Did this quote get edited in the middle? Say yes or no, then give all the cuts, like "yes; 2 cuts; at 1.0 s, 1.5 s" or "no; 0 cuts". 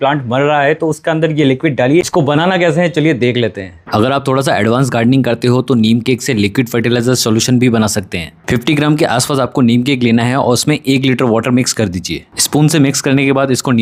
no; 0 cuts